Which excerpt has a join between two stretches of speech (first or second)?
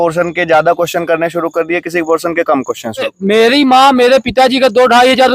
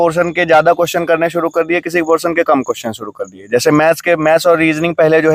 first